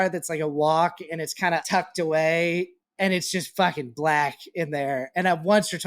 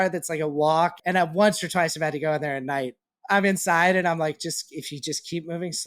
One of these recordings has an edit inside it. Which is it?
second; 2 cuts; at 1.0 s, 3.0 s

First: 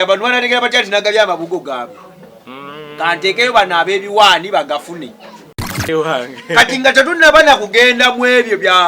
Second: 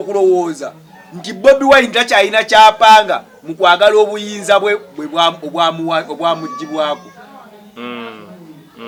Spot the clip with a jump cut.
first; 1 cut; at 5.9 s

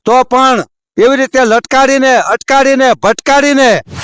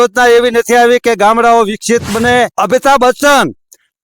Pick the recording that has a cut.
second; 1 cut; at 2.5 s

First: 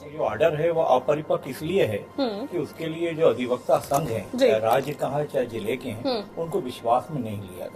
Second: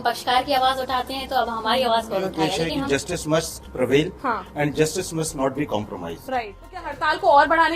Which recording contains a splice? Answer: second; 2 cuts; at 2.7 s, 6.8 s

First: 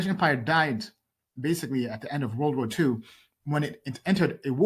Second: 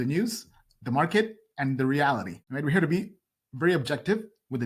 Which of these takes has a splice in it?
second; 1 cut; at 2.4 s

